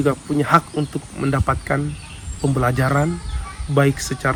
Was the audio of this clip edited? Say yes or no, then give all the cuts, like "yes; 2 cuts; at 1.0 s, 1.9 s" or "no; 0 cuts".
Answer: no; 0 cuts